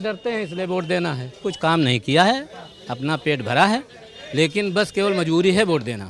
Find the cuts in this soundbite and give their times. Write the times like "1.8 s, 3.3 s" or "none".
1.4 s